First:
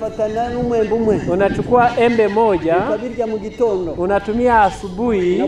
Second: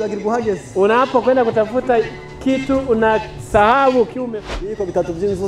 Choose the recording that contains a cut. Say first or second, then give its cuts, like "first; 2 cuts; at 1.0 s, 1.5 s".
second; 1 cut; at 4.2 s